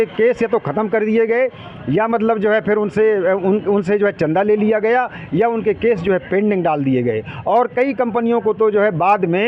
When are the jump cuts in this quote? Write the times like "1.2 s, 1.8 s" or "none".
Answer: none